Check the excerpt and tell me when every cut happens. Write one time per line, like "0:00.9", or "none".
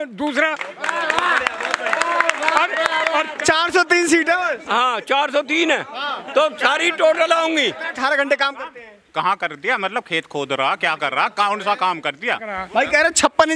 0:03.3
0:07.9
0:12.6